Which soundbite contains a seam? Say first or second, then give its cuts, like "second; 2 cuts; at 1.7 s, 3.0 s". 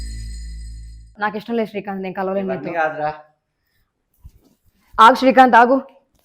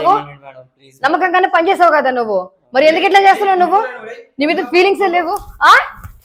first; 1 cut; at 1.1 s